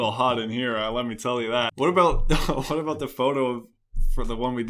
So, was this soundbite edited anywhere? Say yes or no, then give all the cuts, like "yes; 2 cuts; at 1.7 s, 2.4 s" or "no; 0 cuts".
yes; 1 cut; at 1.7 s